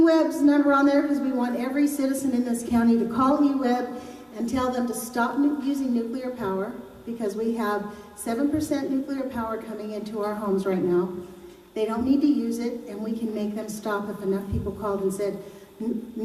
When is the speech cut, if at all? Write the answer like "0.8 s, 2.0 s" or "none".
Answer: 7.6 s